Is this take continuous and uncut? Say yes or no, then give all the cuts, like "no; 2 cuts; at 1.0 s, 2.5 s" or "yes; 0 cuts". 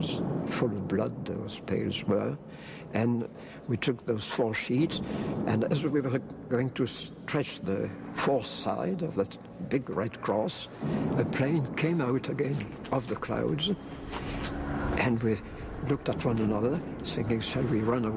no; 1 cut; at 3.4 s